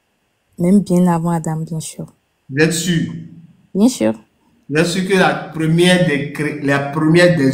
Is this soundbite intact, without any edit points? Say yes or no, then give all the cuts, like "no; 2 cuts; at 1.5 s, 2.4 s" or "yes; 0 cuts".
yes; 0 cuts